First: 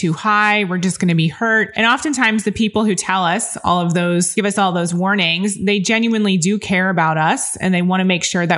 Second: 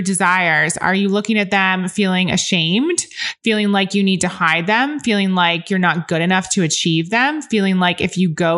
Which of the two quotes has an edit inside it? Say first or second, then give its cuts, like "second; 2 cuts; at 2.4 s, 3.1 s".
first; 2 cuts; at 1.7 s, 4.3 s